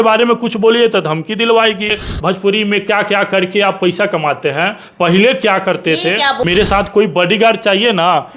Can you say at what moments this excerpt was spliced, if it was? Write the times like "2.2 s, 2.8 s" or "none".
2.0 s, 6.4 s